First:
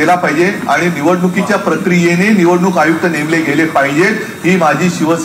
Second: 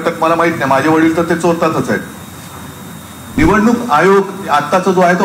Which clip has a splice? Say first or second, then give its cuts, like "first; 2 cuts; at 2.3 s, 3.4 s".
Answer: second; 1 cut; at 3.4 s